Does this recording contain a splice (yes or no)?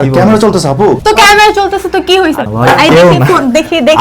yes